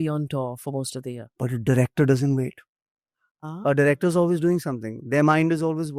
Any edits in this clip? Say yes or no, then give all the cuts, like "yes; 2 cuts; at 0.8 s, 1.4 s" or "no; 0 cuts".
no; 0 cuts